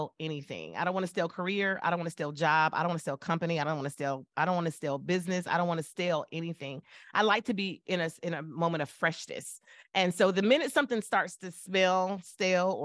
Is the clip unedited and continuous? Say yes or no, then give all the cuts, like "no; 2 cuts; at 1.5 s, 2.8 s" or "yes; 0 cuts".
yes; 0 cuts